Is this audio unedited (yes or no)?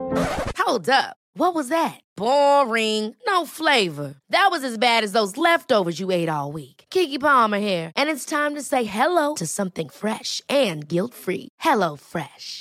yes